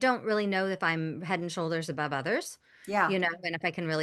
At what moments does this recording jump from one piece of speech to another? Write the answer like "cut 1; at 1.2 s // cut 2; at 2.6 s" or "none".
none